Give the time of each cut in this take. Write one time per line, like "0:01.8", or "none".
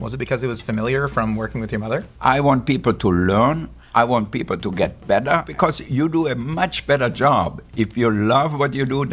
0:02.1
0:05.5